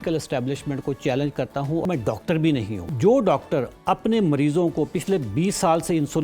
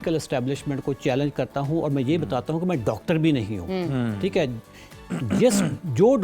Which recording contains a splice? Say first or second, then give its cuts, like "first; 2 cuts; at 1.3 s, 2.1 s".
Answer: first; 2 cuts; at 1.8 s, 2.9 s